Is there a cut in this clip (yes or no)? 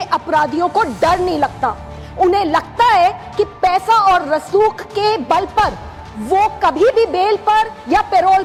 no